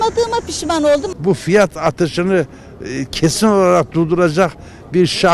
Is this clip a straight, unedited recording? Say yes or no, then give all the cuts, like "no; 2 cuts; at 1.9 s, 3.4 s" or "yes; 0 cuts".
no; 1 cut; at 1.1 s